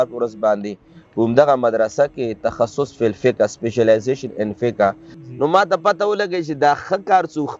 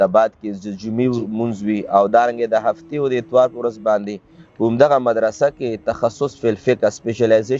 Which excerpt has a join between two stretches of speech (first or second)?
first